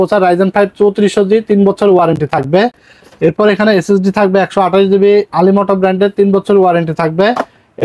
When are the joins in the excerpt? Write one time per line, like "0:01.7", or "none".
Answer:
none

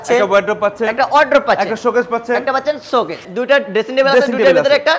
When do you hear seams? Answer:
0:03.2

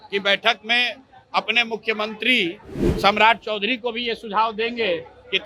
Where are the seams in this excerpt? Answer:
none

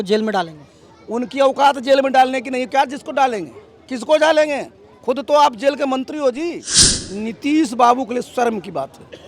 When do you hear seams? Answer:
0:06.9

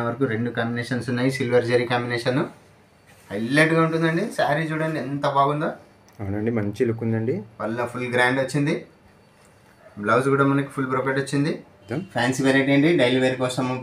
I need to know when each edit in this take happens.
0:12.0

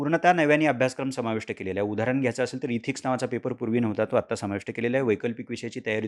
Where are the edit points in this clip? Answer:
none

